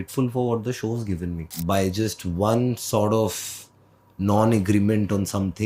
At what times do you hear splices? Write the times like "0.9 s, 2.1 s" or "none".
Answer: 1.5 s